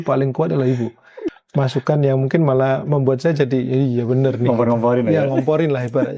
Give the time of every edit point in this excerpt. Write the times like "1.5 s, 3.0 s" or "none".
1.1 s